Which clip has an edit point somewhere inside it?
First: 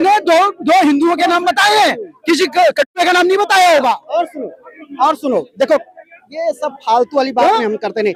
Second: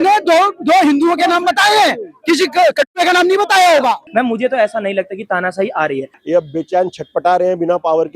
second; 2 cuts; at 4.0 s, 6.0 s

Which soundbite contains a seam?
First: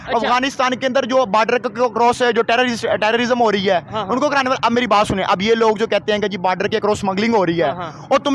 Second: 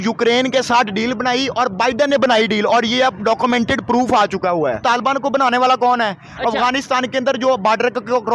second; 1 cut; at 4.8 s

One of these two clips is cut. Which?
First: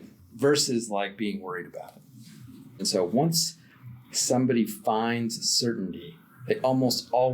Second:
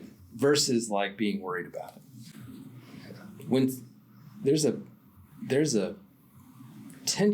first; 1 cut; at 2.8 s

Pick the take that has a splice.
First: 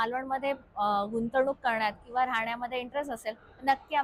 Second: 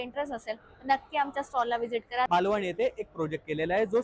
second; 1 cut; at 2.3 s

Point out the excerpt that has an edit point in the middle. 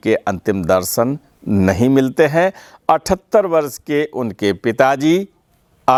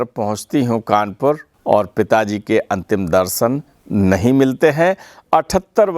second; 1 cut; at 1.5 s

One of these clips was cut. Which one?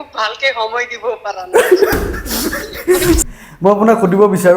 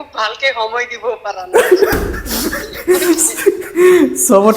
first; 1 cut; at 3.3 s

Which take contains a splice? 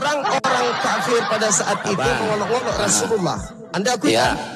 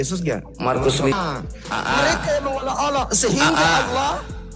second; 1 cut; at 1.1 s

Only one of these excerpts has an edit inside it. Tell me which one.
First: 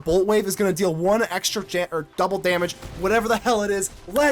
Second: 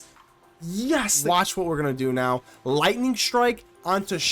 second; 1 cut; at 1.1 s

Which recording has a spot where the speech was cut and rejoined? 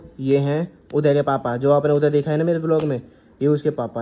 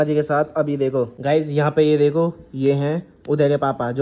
second; 1 cut; at 1.2 s

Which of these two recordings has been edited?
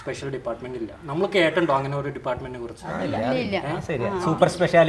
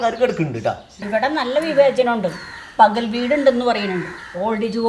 second; 1 cut; at 0.9 s

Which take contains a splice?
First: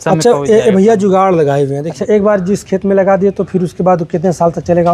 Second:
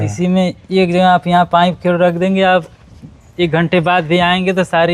first; 1 cut; at 1.9 s

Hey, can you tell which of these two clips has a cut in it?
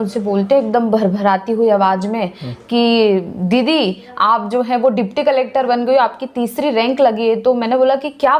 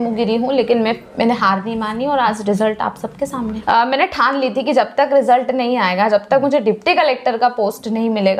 second; 1 cut; at 3.5 s

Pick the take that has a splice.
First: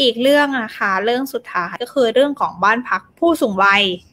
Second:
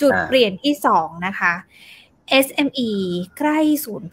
first; 1 cut; at 1.8 s

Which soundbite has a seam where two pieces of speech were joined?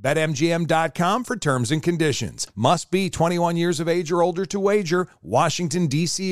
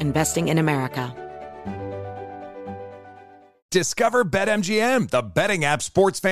second; 1 cut; at 1.1 s

